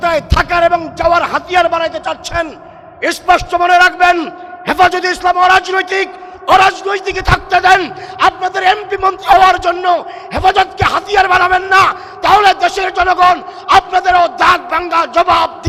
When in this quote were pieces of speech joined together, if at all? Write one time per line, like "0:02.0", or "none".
none